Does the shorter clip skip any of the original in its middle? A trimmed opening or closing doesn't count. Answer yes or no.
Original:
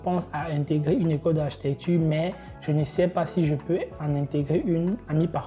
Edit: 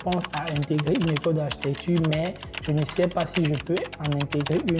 no